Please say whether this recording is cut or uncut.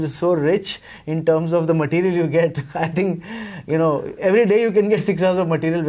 uncut